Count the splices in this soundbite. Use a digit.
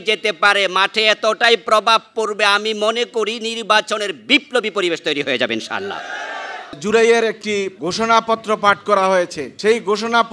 3